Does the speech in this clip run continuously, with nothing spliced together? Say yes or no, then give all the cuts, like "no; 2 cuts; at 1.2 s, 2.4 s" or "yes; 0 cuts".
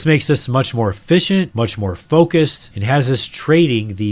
yes; 0 cuts